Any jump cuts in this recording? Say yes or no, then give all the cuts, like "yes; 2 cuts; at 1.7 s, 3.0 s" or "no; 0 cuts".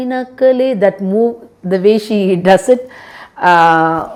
no; 0 cuts